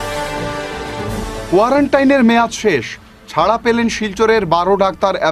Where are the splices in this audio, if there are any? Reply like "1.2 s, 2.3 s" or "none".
0.9 s